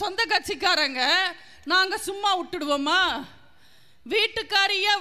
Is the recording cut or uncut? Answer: uncut